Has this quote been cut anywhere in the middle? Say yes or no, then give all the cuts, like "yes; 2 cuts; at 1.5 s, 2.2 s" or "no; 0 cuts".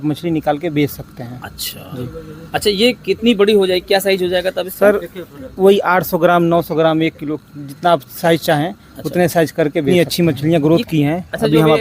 yes; 1 cut; at 9.9 s